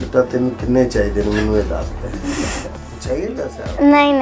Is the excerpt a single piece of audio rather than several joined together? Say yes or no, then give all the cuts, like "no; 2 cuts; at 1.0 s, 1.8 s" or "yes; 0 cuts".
yes; 0 cuts